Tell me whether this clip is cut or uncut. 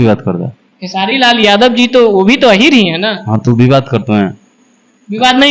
uncut